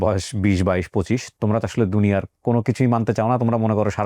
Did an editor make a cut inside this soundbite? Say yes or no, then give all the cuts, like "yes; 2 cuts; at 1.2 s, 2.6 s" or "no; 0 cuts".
no; 0 cuts